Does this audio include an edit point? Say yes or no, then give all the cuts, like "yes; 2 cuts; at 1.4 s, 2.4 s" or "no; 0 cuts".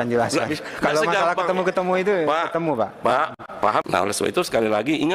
yes; 1 cut; at 3.8 s